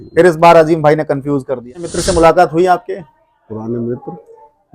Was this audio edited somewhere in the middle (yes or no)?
yes